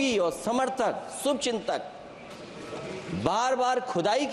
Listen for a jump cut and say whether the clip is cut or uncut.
uncut